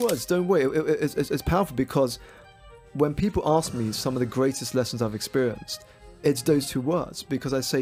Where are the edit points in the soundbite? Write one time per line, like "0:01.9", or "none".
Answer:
none